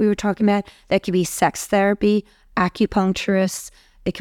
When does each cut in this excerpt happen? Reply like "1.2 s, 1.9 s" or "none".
none